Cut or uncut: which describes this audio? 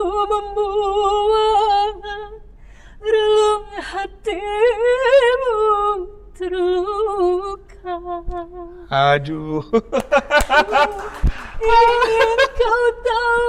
uncut